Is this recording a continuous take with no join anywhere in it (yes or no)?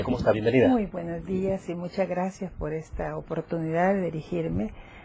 yes